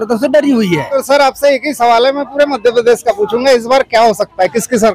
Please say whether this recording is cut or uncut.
cut